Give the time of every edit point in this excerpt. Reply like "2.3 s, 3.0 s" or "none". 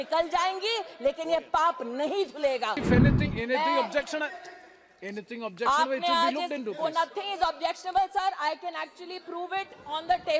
2.8 s